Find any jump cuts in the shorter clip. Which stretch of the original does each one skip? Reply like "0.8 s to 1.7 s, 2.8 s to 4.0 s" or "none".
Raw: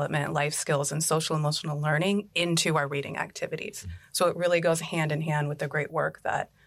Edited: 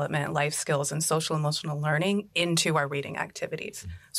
none